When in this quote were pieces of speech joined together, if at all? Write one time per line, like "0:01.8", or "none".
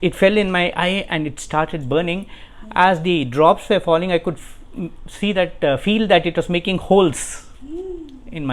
none